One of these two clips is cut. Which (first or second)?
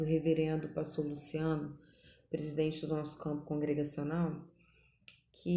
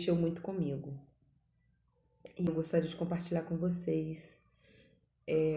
second